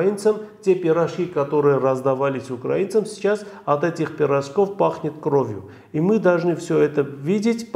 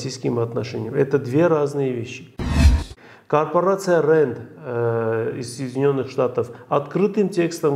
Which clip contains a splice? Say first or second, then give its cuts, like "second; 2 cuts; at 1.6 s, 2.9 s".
second; 1 cut; at 2.6 s